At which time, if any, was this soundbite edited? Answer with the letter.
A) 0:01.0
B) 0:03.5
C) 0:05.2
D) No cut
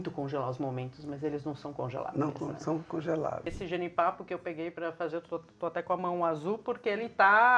B